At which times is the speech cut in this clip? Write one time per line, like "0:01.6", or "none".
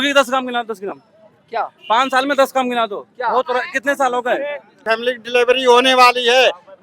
0:04.8